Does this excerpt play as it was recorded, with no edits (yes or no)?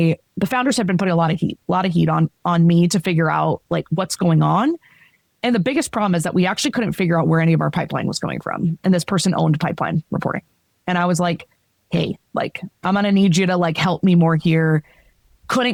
yes